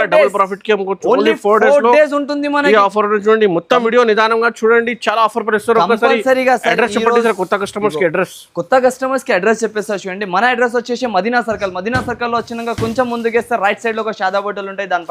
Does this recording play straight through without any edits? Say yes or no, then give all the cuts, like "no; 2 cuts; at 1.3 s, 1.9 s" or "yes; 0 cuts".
yes; 0 cuts